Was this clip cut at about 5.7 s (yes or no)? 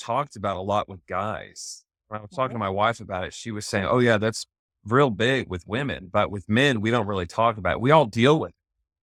no